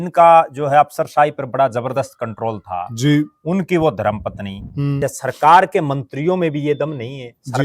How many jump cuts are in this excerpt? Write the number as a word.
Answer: one